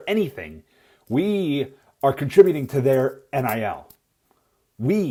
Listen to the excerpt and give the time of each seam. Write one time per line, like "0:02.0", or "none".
none